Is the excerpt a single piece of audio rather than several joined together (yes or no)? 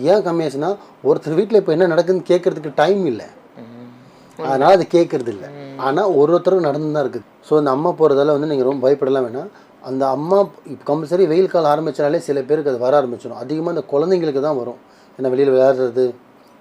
yes